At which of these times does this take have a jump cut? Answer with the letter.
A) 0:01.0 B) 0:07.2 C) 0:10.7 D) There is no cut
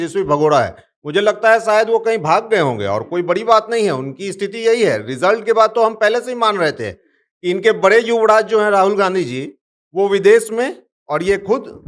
D